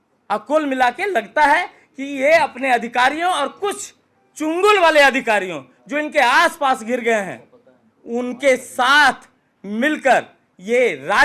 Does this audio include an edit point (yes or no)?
no